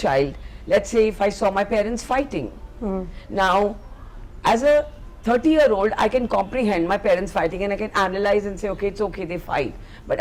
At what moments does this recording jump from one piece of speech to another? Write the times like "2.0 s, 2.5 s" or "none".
none